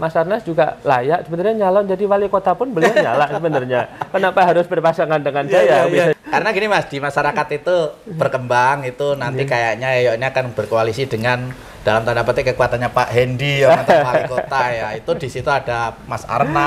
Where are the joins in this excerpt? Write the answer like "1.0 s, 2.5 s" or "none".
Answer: 6.2 s

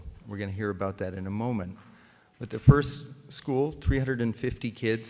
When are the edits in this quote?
none

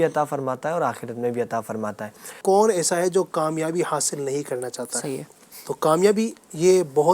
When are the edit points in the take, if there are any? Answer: 2.4 s

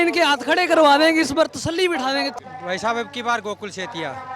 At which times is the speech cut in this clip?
2.4 s

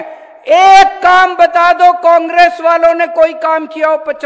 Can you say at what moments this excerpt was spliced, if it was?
none

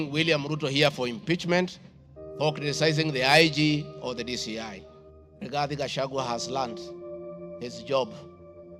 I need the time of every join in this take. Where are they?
4.8 s

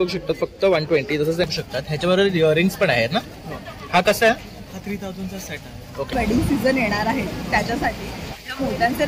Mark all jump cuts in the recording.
1.5 s, 6.1 s

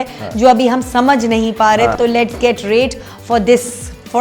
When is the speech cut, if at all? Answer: 2.0 s

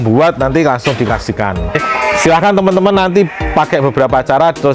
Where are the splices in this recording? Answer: 1.8 s

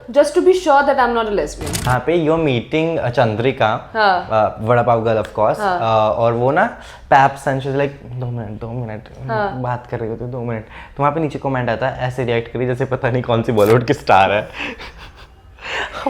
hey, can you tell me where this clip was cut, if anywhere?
1.9 s

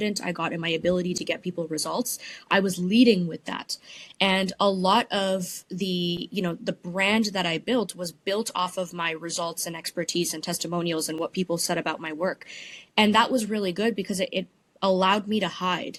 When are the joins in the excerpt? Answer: none

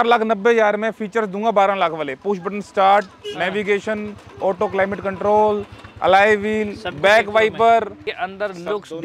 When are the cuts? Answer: 8.1 s

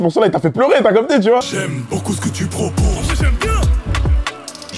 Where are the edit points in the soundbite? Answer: 1.5 s

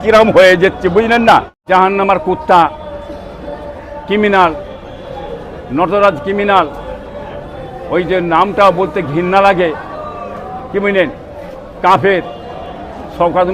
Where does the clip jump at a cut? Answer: 1.6 s

